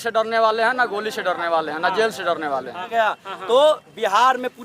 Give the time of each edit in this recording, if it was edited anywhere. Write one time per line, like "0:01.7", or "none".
0:02.9